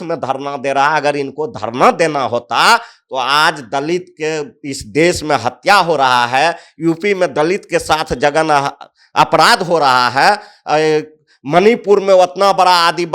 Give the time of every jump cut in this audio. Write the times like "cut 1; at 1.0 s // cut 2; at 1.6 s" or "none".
none